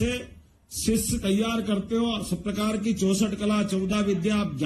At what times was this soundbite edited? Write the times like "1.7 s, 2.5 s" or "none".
none